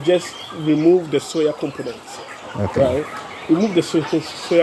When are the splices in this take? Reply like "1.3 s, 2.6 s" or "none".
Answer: none